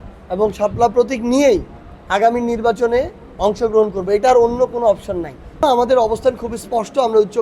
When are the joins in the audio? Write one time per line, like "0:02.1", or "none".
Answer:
0:05.6